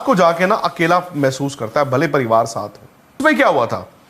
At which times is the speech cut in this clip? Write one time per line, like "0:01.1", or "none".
0:03.2